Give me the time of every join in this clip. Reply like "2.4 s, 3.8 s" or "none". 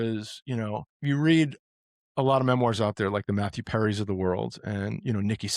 0.9 s